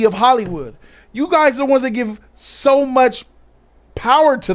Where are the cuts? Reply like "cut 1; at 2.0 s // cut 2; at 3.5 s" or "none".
none

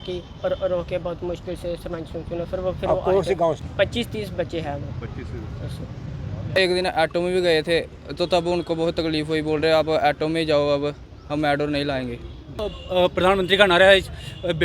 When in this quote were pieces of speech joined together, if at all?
cut 1; at 3.6 s // cut 2; at 6.6 s // cut 3; at 12.7 s

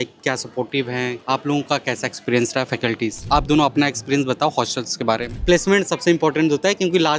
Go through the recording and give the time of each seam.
cut 1; at 1.2 s // cut 2; at 3.3 s // cut 3; at 5.3 s

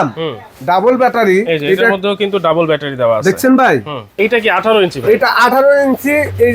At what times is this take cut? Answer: cut 1; at 4.0 s

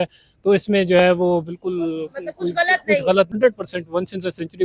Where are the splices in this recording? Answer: cut 1; at 3.3 s

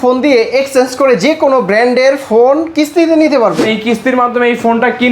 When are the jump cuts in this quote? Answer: cut 1; at 3.6 s

